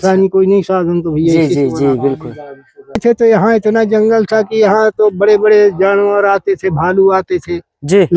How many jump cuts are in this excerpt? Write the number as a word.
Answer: one